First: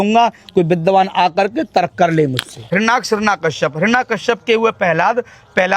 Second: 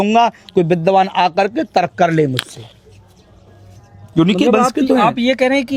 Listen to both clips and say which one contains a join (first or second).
first